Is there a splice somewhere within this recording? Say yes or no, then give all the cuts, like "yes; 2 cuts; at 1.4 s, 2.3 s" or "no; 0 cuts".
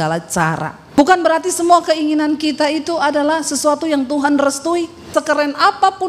yes; 2 cuts; at 1.0 s, 5.1 s